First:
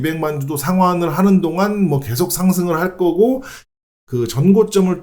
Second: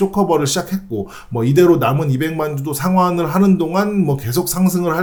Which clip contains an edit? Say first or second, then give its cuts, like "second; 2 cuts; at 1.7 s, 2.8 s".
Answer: first; 1 cut; at 3.8 s